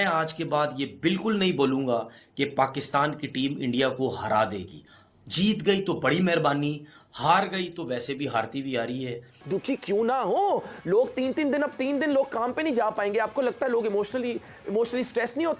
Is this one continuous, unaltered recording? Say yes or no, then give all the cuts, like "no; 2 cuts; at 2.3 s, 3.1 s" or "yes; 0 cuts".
no; 1 cut; at 9.4 s